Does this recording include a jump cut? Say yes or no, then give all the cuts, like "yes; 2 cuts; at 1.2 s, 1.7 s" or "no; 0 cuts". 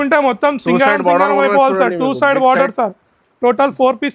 no; 0 cuts